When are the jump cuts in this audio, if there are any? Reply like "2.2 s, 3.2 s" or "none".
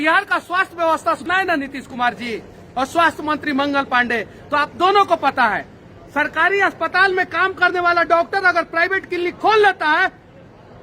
1.2 s